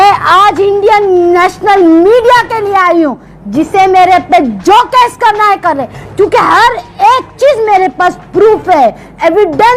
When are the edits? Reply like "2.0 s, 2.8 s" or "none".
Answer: none